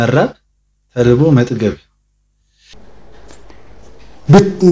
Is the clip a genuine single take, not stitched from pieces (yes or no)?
no